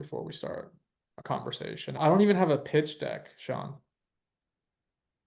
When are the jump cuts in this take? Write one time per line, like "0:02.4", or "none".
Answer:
0:02.0